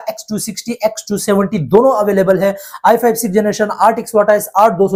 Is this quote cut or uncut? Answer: uncut